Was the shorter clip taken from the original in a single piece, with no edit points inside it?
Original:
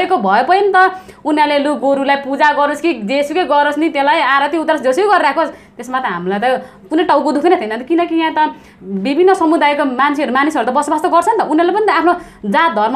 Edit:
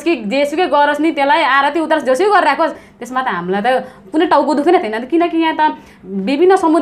yes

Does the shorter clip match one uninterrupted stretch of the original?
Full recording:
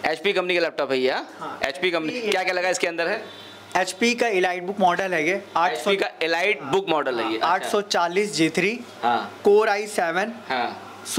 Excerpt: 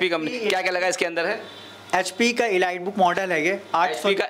yes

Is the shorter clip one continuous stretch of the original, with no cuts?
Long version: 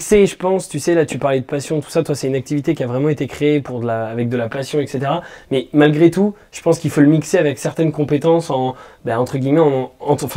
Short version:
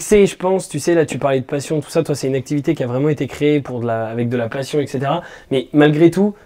yes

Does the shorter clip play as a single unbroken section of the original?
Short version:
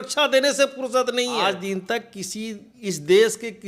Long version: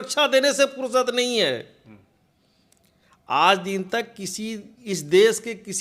no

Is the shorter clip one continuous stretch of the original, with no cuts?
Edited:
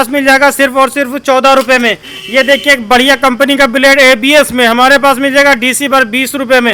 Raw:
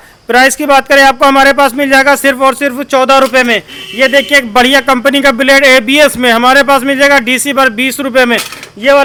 yes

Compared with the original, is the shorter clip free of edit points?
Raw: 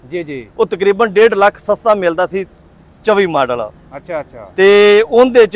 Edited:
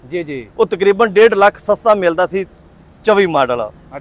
yes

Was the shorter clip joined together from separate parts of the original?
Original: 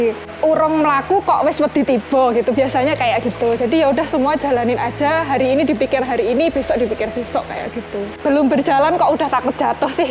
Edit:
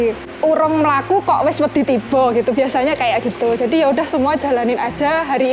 no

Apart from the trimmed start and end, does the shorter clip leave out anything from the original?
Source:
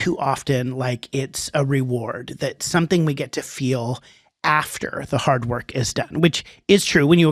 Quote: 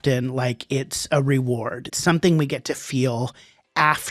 yes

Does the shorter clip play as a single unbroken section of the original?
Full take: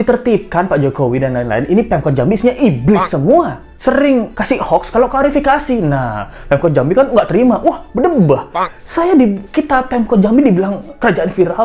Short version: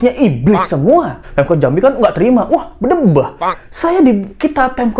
no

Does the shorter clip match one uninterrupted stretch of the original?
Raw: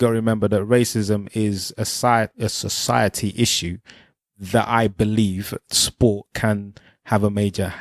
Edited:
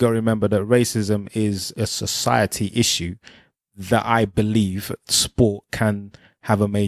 no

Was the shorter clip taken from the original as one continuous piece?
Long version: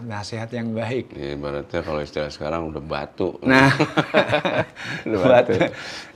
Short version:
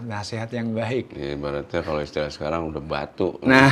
yes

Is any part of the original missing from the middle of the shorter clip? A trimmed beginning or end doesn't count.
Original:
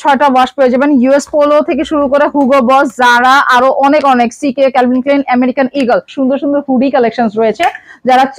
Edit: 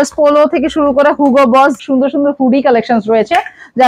yes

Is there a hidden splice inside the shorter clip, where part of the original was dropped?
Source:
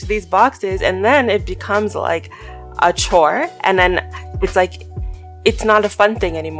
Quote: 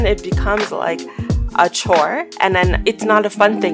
yes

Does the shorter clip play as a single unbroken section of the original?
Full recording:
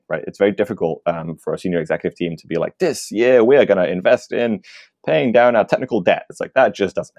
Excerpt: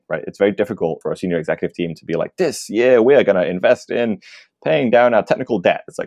no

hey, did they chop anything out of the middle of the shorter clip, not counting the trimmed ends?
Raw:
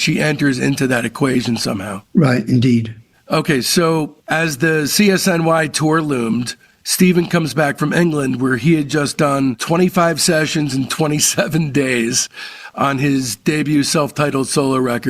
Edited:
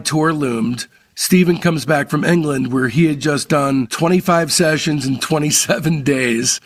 no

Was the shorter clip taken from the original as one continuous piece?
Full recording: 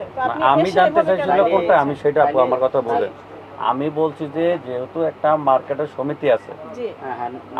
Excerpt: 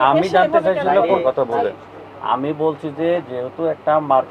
no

